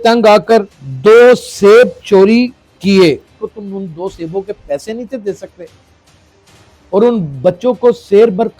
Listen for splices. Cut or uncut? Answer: cut